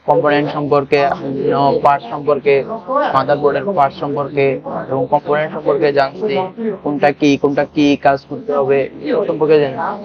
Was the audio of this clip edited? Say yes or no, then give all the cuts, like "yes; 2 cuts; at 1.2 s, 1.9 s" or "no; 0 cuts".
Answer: no; 0 cuts